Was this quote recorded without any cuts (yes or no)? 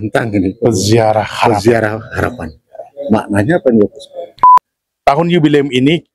no